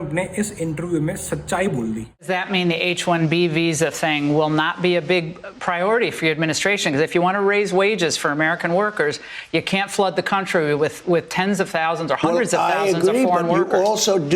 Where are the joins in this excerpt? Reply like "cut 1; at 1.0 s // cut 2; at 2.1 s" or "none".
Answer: cut 1; at 2.3 s

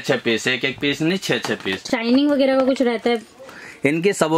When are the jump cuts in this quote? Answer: cut 1; at 1.9 s

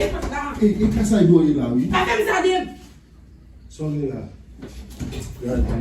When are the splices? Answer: none

